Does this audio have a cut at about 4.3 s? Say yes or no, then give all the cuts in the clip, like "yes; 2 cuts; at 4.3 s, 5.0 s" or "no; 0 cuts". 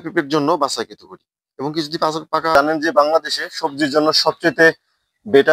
no; 1 cut; at 2.6 s